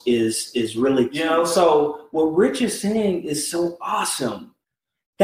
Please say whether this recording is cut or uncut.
cut